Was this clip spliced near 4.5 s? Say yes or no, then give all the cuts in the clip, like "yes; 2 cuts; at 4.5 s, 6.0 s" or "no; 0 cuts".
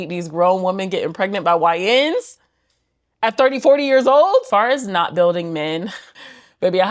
yes; 1 cut; at 4.5 s